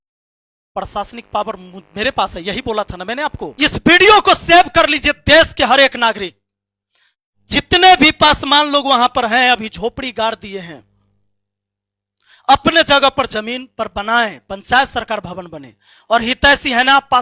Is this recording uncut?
no; 1 cut; at 3.4 s

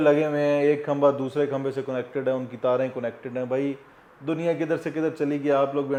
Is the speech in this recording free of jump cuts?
yes; 0 cuts

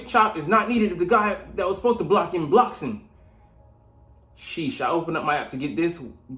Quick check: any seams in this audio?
no; 0 cuts

